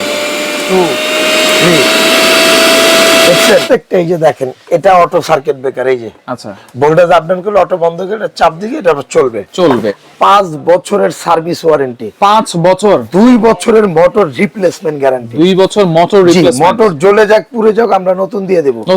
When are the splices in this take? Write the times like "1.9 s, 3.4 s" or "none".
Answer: 3.6 s, 10.0 s